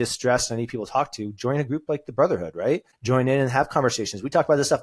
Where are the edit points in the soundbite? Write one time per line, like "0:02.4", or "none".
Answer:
0:02.9

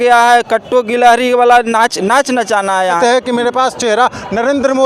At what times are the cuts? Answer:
0:03.0

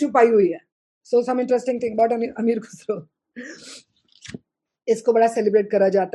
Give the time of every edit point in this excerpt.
0:00.9

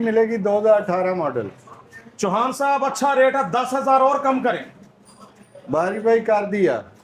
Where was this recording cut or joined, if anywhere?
none

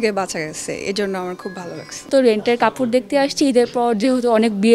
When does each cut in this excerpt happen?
0:02.1

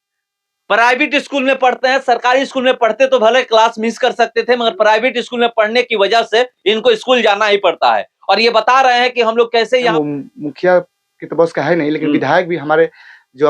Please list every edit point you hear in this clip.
0:09.9

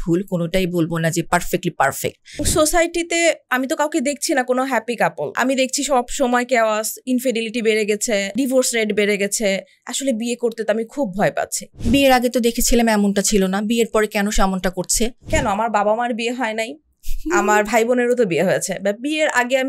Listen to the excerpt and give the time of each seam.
0:02.5
0:05.4
0:08.3
0:11.7
0:15.2

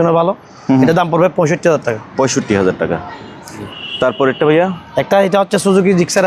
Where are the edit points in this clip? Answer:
none

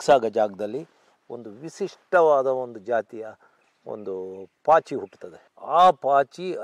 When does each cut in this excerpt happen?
none

